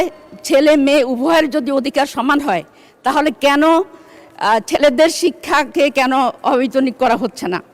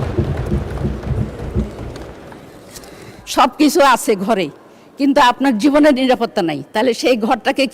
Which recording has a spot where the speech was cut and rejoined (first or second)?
second